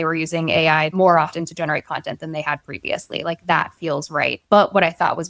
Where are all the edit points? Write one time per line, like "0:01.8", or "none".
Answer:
0:00.9
0:04.4

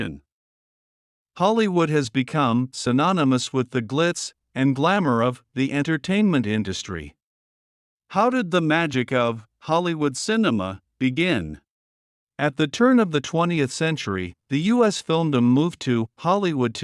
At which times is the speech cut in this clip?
none

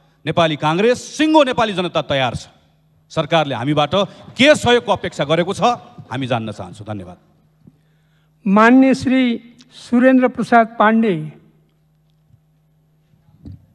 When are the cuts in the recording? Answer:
none

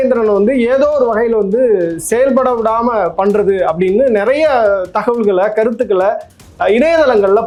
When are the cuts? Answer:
none

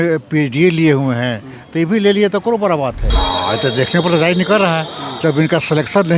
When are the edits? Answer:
0:03.1

